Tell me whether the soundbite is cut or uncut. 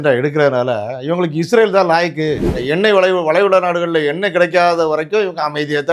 cut